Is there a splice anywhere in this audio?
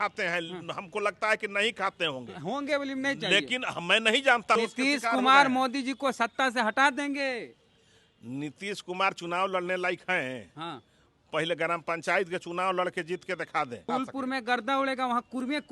yes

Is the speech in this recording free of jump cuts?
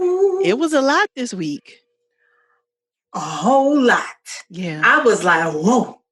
yes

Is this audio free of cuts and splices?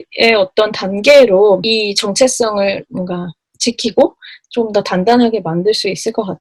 yes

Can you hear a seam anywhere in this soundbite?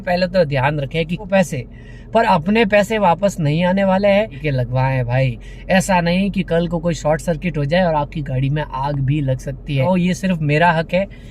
yes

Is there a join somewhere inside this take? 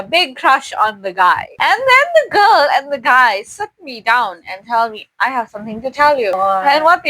yes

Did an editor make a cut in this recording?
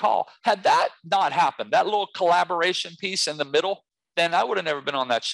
yes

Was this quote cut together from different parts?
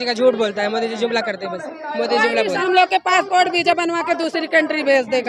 yes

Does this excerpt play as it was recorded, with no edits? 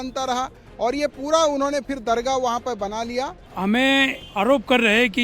no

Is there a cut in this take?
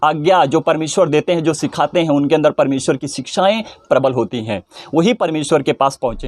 no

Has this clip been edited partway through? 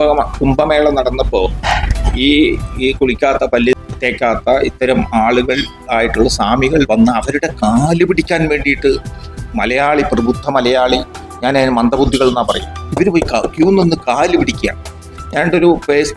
yes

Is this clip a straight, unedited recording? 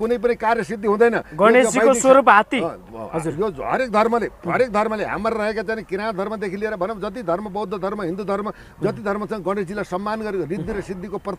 yes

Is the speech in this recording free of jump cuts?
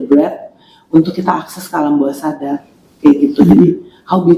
yes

